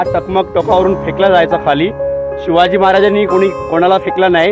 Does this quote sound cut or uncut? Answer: uncut